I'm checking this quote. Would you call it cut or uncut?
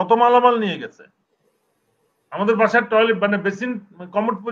uncut